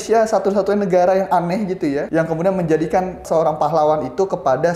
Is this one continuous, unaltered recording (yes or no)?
no